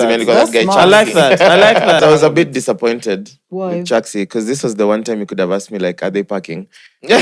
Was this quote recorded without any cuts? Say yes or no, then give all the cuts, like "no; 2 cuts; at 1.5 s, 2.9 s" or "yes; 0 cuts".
no; 1 cut; at 2.0 s